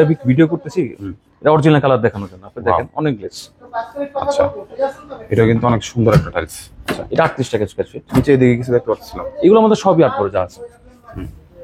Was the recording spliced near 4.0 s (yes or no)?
no